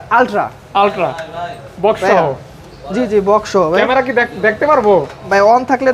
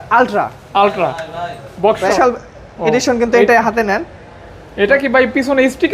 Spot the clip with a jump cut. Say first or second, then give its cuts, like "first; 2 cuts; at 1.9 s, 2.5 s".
second; 1 cut; at 2.1 s